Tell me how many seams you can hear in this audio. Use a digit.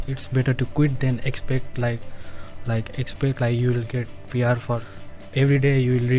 1